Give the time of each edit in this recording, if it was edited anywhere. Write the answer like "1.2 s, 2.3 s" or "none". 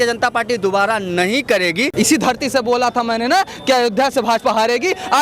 1.9 s